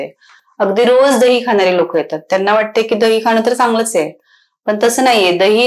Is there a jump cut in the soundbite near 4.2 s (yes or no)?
no